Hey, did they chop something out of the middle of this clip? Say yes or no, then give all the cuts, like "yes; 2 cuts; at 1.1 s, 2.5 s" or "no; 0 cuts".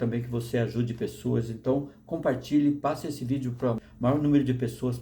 yes; 1 cut; at 3.8 s